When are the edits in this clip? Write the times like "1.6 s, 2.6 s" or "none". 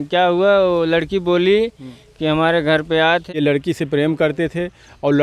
3.4 s

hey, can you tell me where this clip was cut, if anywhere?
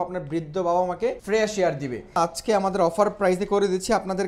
1.2 s, 2.2 s

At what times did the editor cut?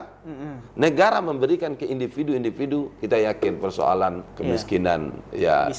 4.3 s

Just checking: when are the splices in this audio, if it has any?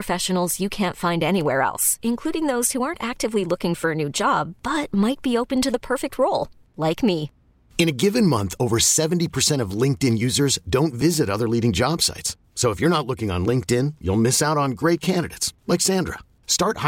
none

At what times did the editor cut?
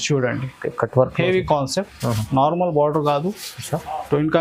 none

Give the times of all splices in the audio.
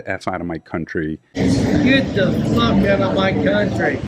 none

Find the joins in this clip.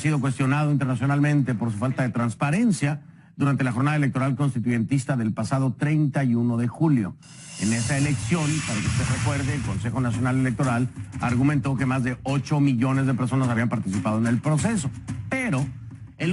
11.0 s

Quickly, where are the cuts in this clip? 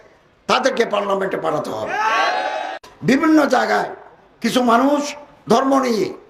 3.1 s

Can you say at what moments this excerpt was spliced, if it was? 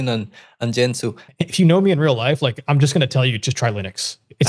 1.2 s

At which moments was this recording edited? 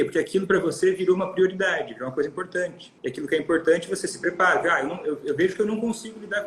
2.9 s

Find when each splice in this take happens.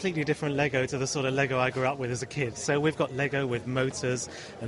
2.6 s

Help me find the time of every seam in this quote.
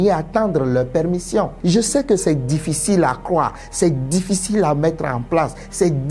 1.5 s

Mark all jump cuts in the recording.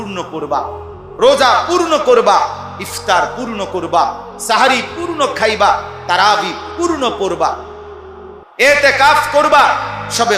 none

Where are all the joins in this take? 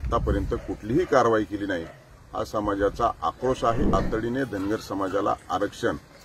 3.9 s

